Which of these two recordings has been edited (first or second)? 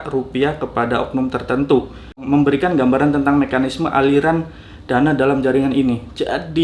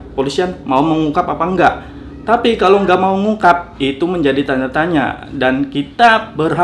first